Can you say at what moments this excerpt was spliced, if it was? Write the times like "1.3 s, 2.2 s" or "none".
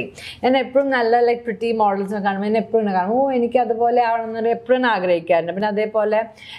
none